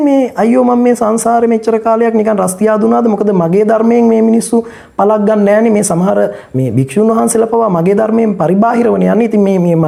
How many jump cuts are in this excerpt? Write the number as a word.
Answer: zero